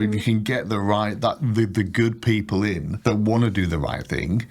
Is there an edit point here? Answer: yes; 1 cut; at 2.9 s

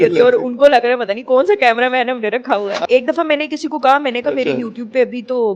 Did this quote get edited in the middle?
yes; 1 cut; at 2.8 s

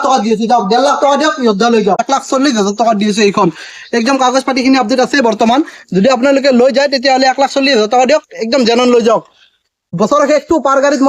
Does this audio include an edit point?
yes; 2 cuts; at 2.0 s, 9.9 s

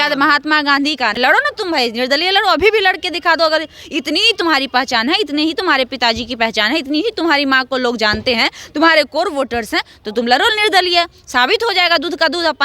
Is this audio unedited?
no; 1 cut; at 1.2 s

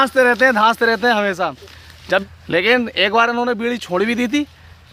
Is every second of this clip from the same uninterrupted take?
yes; 0 cuts

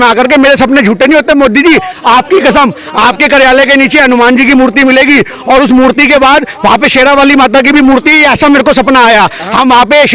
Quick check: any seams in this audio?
no; 0 cuts

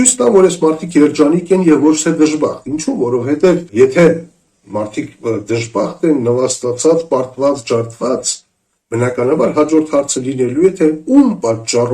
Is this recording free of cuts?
no; 1 cut; at 3.7 s

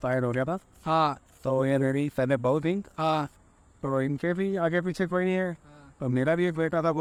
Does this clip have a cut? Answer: no; 0 cuts

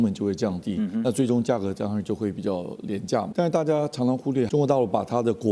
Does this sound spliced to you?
yes; 2 cuts; at 3.3 s, 4.5 s

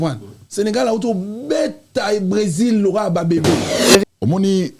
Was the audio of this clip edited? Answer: yes; 1 cut; at 3.8 s

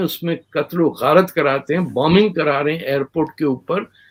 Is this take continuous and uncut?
yes; 0 cuts

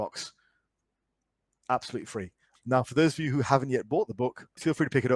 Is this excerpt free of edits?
no; 1 cut; at 2.4 s

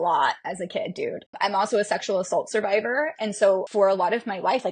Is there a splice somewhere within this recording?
yes; 2 cuts; at 1.3 s, 3.7 s

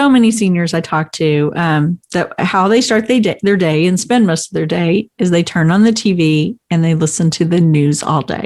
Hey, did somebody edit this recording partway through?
no; 0 cuts

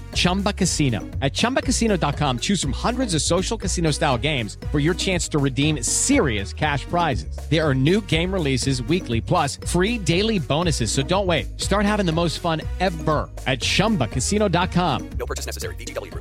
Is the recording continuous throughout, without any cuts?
yes; 0 cuts

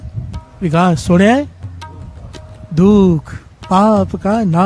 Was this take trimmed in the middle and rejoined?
no; 0 cuts

